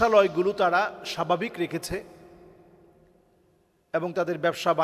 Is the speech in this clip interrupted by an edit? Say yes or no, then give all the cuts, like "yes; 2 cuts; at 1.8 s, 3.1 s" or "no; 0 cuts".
no; 0 cuts